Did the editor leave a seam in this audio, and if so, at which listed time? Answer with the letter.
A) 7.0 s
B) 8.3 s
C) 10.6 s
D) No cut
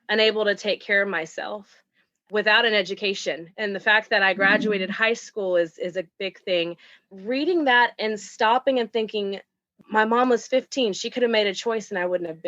A